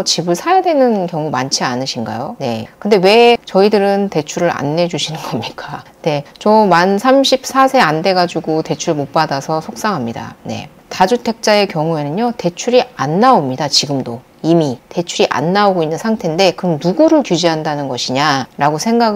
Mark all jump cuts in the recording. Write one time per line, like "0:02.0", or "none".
0:10.8